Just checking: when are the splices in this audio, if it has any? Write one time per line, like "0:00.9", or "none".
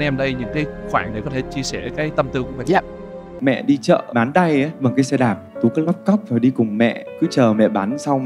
0:03.3